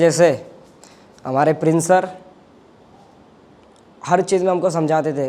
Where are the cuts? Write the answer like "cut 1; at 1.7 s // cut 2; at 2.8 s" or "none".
none